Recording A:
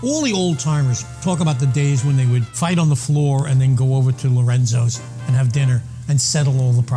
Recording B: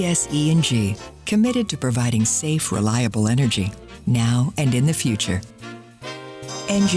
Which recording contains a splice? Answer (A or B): A